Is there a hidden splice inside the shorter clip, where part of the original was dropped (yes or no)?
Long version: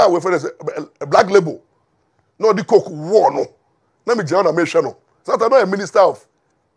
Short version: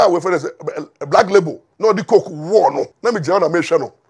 yes